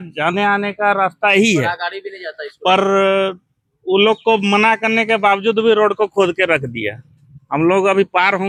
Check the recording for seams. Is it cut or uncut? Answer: uncut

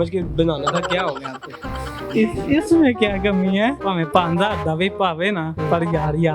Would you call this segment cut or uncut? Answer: cut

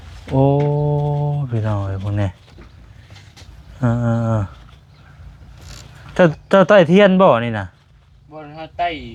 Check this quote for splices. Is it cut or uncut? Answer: uncut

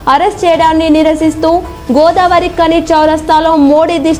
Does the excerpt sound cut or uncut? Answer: uncut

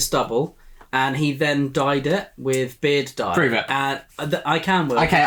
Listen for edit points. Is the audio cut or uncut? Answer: uncut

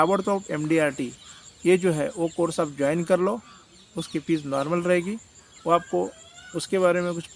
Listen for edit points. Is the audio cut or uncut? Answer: uncut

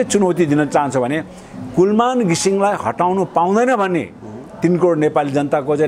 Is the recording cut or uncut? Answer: uncut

